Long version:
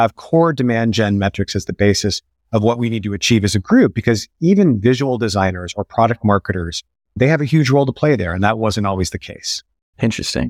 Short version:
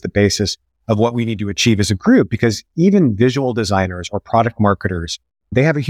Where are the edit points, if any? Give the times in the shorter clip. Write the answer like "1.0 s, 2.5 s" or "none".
none